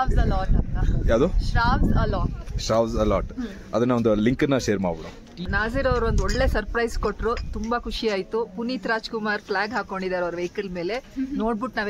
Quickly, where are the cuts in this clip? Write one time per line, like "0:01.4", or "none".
0:05.5